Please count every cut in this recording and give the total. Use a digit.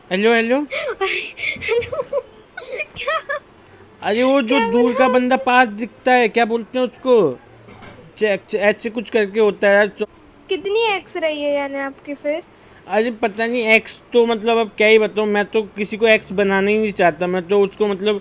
1